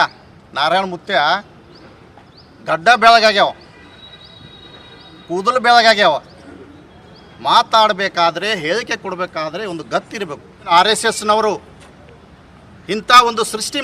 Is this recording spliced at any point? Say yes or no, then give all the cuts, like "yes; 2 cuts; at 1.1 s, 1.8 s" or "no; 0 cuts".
yes; 1 cut; at 10.5 s